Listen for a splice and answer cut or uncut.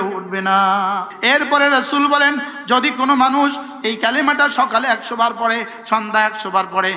cut